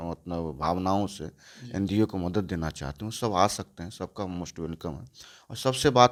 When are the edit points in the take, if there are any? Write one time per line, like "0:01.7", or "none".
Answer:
none